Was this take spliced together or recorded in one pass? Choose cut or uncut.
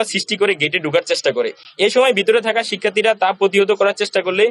uncut